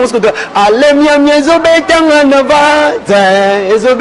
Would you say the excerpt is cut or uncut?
uncut